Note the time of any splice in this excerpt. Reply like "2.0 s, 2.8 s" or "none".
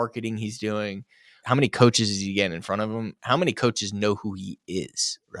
1.4 s